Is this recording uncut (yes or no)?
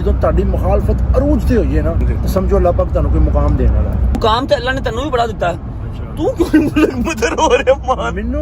no